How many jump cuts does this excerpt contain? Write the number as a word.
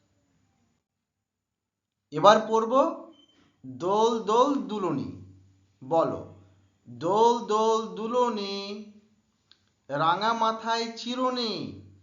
zero